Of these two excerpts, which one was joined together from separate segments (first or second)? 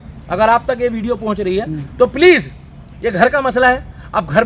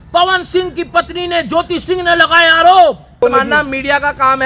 second